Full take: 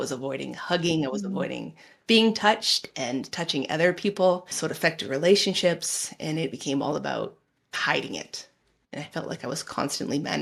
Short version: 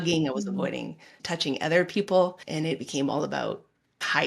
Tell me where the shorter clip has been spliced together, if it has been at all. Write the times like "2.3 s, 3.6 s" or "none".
1.1 s, 2.4 s